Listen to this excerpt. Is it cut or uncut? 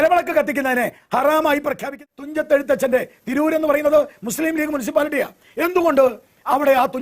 cut